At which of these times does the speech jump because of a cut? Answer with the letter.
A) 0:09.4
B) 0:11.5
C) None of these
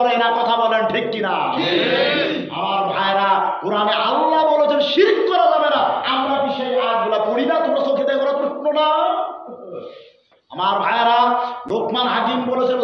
C